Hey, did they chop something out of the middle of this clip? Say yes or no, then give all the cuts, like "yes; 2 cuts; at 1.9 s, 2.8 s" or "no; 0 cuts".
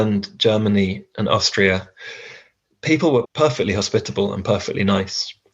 yes; 1 cut; at 3.3 s